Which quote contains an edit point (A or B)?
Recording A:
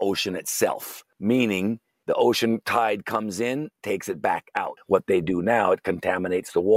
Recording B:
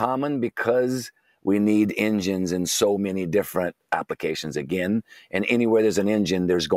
A